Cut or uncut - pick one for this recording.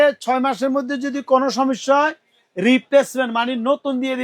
uncut